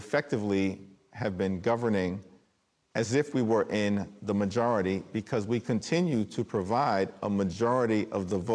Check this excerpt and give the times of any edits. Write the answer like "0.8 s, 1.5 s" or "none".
none